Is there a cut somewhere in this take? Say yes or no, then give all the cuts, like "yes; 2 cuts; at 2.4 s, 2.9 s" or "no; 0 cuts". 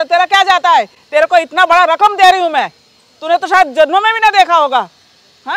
no; 0 cuts